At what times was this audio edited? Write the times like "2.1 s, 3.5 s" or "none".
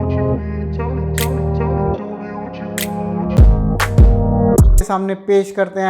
3.4 s, 4.9 s